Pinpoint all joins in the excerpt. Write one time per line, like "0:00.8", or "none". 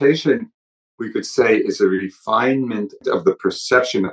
0:03.0

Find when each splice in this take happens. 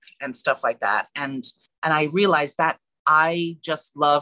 0:01.6
0:02.9

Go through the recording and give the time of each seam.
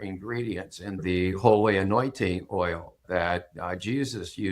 0:01.0
0:03.0

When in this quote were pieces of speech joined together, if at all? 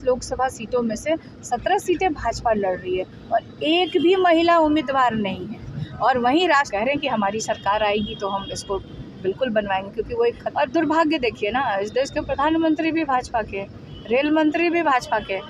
0:06.7
0:10.4

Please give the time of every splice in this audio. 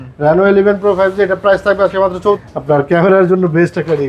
0:02.4

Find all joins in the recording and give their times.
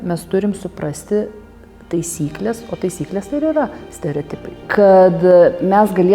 0:04.6

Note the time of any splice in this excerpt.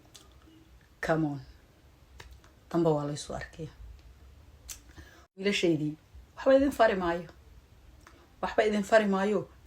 0:05.4

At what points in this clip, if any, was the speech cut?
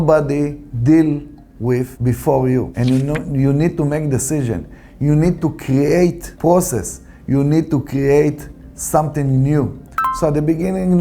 0:09.9

